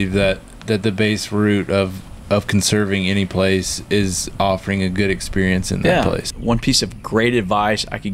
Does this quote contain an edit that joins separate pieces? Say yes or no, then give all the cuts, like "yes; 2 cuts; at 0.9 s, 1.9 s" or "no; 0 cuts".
yes; 1 cut; at 6.3 s